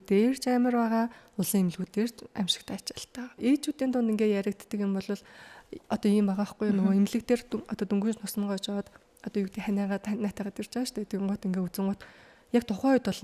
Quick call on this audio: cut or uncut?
cut